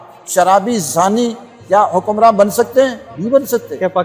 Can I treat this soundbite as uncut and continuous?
no; 1 cut; at 3.1 s

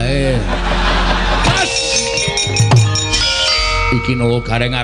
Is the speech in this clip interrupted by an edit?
yes; 2 cuts; at 1.4 s, 3.2 s

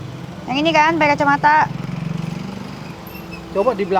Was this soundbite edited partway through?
no; 0 cuts

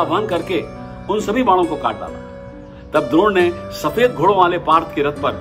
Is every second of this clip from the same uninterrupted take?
yes; 0 cuts

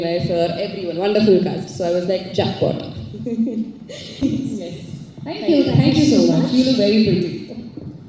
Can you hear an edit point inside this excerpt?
yes; 1 cut; at 4.2 s

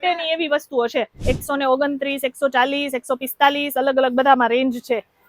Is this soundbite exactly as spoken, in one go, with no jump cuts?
no; 1 cut; at 1.1 s

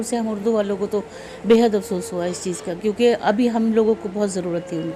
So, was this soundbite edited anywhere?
no; 0 cuts

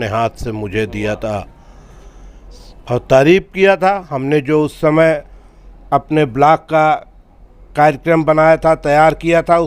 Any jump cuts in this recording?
no; 0 cuts

